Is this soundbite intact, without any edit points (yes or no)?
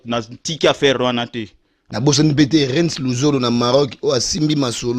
no